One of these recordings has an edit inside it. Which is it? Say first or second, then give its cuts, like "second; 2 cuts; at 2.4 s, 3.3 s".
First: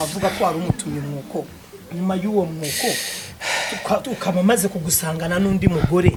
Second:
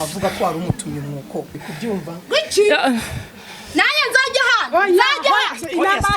second; 1 cut; at 1.6 s